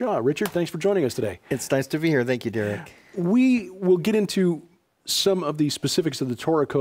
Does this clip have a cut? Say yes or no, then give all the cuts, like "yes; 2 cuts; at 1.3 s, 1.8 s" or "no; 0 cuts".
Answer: yes; 1 cut; at 4.9 s